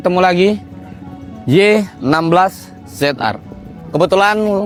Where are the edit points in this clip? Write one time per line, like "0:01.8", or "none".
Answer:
none